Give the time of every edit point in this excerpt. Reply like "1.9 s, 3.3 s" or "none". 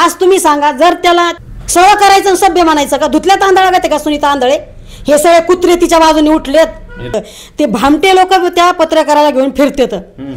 1.3 s, 7.1 s